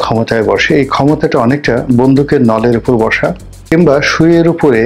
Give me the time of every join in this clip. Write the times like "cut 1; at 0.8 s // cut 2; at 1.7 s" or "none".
cut 1; at 3.5 s